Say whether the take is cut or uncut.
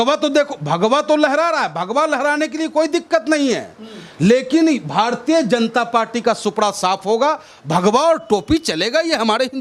uncut